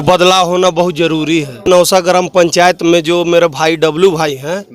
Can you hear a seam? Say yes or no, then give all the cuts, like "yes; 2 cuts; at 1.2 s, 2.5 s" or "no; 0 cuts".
yes; 1 cut; at 1.7 s